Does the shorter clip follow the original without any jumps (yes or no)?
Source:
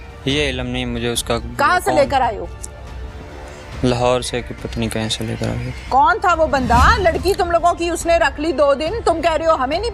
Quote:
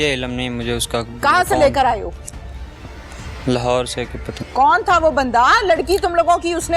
no